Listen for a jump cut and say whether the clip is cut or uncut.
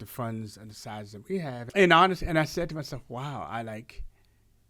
cut